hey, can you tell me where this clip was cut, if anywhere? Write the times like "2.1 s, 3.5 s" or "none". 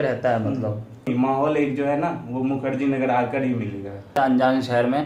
1.1 s, 4.1 s